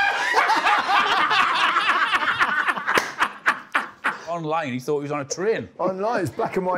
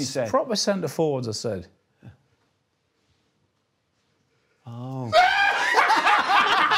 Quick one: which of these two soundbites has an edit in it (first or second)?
first